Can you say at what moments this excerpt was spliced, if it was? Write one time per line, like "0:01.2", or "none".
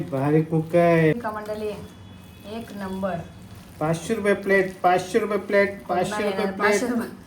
0:01.1